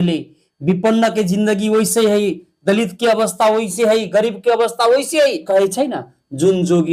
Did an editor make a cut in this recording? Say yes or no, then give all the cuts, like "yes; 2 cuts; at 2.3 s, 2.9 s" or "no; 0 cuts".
yes; 1 cut; at 5.4 s